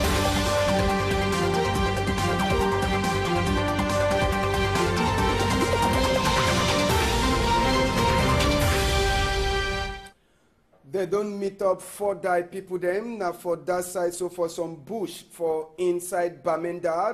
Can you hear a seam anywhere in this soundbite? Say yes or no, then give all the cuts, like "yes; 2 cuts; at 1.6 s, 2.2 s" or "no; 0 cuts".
no; 0 cuts